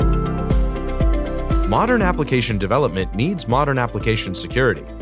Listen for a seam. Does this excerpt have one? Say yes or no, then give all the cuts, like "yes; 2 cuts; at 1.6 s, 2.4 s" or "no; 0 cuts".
no; 0 cuts